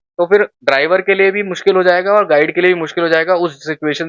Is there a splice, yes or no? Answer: no